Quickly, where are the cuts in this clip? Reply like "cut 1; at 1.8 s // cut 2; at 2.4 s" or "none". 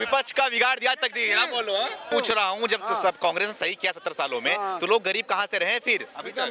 cut 1; at 2.1 s